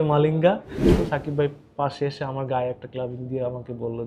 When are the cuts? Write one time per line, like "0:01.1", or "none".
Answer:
0:00.9

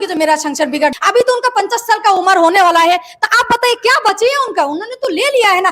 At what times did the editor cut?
0:00.9

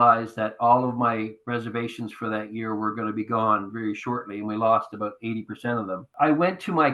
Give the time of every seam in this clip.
0:06.0

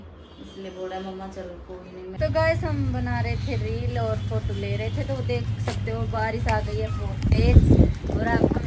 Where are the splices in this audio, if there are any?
0:02.2

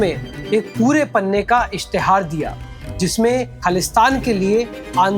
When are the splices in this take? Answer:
0:03.5

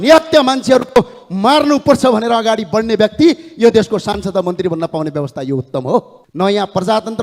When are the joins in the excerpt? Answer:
0:06.2

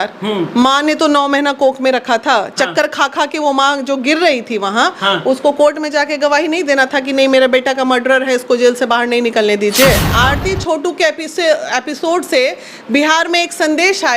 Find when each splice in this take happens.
0:10.1

